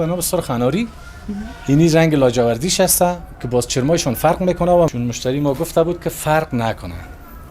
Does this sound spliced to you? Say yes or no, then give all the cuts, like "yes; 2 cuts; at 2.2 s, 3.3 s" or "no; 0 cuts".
yes; 1 cut; at 4.9 s